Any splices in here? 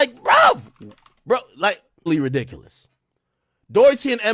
yes; 1 cut; at 2.1 s

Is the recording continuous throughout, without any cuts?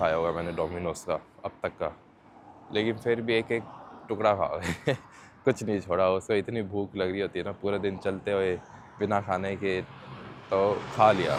yes; 0 cuts

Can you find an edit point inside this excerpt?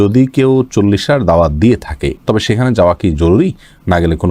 no; 0 cuts

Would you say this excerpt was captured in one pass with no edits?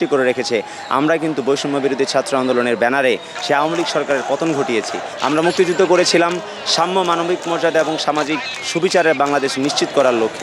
no; 1 cut; at 5.0 s

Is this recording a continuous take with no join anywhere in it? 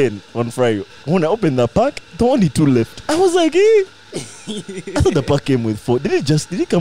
no; 2 cuts; at 0.9 s, 3.0 s

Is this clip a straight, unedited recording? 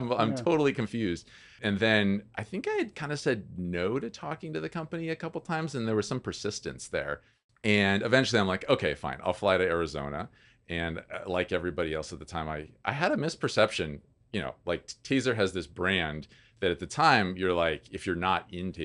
no; 1 cut; at 1.5 s

